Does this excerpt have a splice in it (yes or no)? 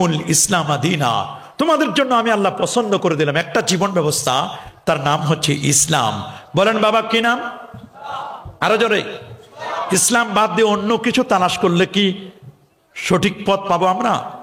no